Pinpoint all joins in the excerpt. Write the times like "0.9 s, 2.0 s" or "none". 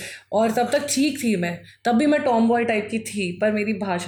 none